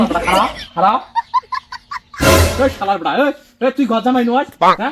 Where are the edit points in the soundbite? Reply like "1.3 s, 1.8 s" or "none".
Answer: none